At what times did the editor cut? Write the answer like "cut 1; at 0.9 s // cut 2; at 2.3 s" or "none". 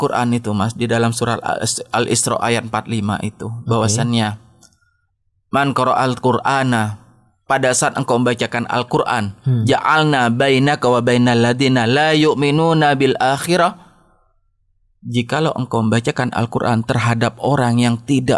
none